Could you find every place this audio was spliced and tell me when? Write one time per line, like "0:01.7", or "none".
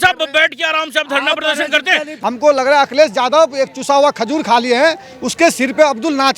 0:02.1